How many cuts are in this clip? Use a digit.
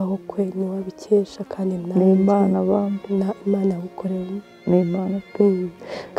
0